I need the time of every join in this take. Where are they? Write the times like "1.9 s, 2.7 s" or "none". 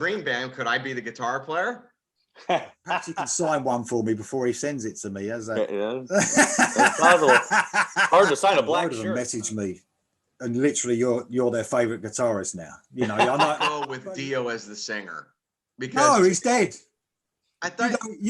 3.1 s, 8.9 s, 13.9 s